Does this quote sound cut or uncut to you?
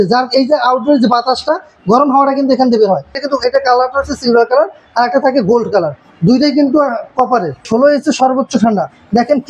cut